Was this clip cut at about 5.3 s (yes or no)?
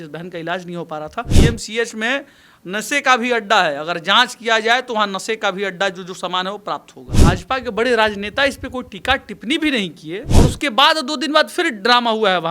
no